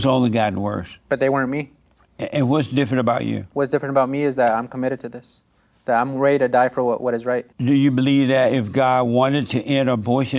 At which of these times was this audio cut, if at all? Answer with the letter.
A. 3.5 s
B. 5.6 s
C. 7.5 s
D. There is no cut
C